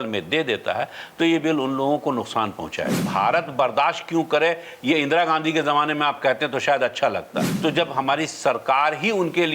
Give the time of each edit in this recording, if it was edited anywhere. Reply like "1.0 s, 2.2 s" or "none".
3.0 s, 7.4 s